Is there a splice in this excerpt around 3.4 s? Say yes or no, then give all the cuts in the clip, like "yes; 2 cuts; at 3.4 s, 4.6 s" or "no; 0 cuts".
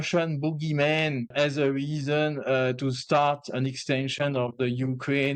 no; 1 cut; at 1.3 s